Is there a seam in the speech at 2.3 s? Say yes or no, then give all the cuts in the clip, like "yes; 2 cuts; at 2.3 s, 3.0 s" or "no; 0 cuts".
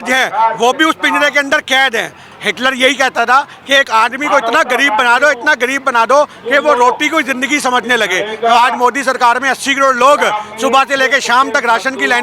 yes; 1 cut; at 2.3 s